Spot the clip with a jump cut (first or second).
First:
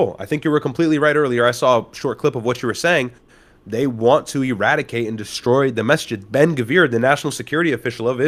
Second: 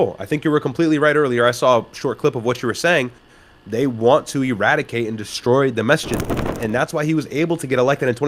second